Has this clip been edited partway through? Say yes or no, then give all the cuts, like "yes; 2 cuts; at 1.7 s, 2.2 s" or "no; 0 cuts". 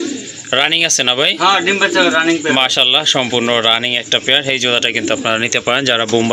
no; 0 cuts